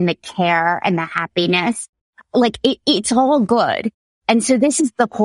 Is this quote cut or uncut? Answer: cut